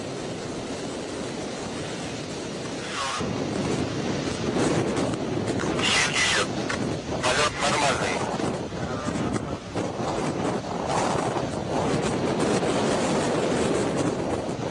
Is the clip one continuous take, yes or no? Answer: yes